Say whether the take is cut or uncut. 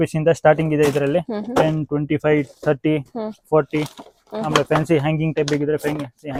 uncut